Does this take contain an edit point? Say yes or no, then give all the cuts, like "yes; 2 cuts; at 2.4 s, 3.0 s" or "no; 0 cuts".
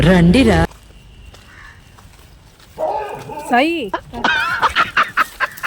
yes; 2 cuts; at 0.7 s, 4.2 s